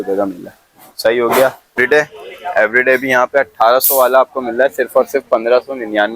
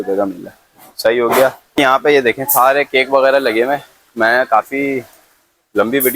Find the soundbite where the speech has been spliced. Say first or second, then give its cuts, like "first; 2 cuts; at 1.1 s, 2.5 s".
first; 1 cut; at 1.7 s